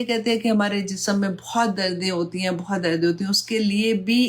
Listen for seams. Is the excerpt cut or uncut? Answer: uncut